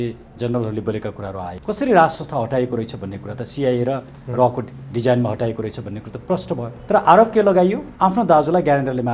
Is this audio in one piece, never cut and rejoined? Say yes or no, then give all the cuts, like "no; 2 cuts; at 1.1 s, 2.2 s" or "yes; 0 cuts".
no; 3 cuts; at 1.5 s, 6.7 s, 7.9 s